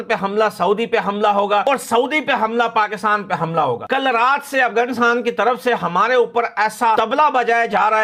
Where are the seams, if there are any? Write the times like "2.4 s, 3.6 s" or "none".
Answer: none